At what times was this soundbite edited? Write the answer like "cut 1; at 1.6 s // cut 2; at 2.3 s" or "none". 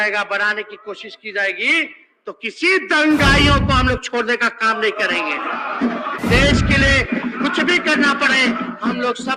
cut 1; at 6.1 s